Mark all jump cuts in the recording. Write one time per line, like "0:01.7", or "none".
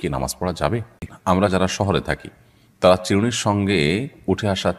0:01.1